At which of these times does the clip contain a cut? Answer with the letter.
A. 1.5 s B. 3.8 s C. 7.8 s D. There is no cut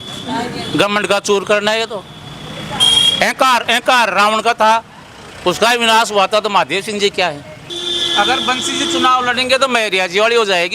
C